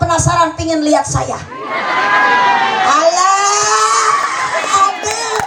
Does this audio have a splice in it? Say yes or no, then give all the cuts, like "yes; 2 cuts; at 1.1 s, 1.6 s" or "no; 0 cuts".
no; 0 cuts